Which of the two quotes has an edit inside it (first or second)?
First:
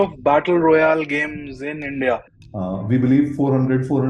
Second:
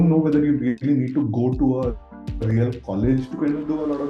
first